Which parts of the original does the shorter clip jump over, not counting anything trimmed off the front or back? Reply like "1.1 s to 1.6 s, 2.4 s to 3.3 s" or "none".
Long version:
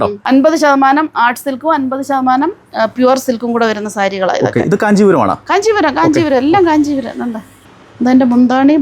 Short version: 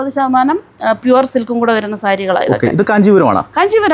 none